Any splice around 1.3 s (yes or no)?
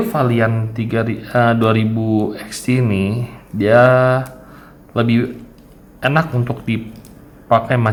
no